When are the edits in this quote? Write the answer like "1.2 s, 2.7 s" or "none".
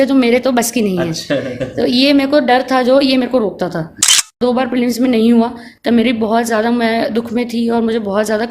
4.3 s